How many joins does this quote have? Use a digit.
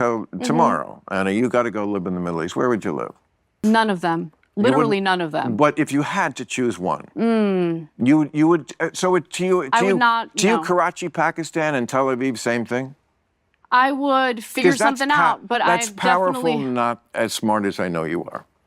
1